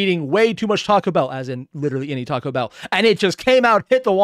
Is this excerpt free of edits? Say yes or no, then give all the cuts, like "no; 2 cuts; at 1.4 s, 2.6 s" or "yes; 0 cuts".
yes; 0 cuts